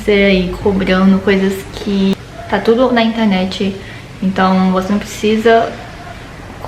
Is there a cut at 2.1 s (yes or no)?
yes